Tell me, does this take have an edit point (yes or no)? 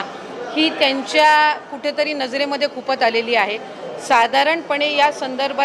no